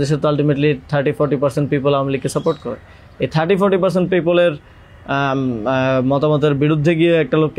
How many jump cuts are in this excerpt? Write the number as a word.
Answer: zero